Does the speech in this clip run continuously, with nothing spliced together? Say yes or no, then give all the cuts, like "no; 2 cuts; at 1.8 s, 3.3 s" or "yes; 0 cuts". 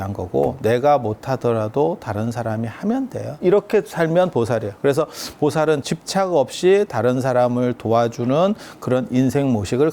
no; 2 cuts; at 3.4 s, 5.8 s